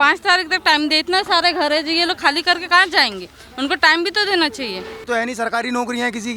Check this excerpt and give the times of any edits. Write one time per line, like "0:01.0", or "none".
0:05.1